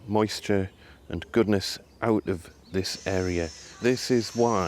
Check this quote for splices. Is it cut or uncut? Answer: cut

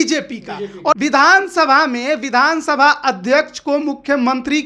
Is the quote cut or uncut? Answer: cut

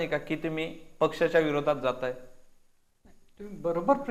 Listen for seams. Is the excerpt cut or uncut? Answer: uncut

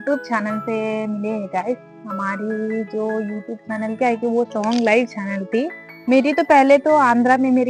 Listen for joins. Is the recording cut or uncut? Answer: cut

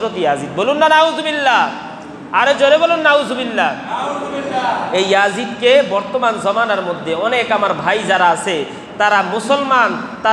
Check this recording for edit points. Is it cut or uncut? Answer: uncut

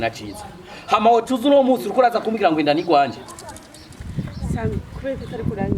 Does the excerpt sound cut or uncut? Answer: uncut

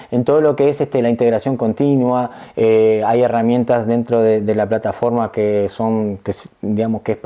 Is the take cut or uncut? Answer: uncut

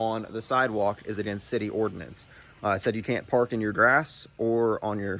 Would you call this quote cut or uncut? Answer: uncut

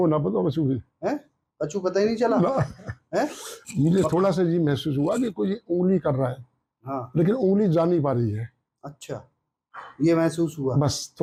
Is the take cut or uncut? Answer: uncut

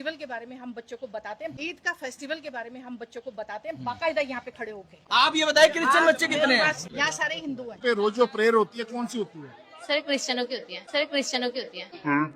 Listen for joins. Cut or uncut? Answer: cut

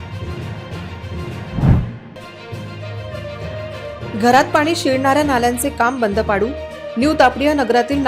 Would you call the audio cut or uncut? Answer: cut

